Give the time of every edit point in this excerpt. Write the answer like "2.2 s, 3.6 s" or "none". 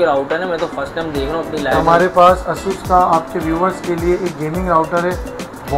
1.8 s